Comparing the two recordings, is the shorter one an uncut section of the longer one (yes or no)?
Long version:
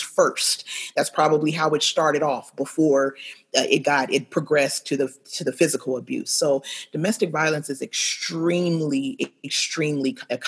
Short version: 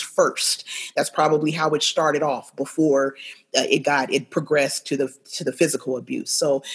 yes